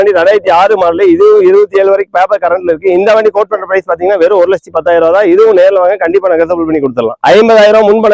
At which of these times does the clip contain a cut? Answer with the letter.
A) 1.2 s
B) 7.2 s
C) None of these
B